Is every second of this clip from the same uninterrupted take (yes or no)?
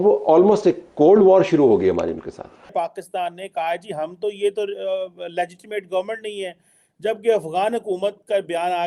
no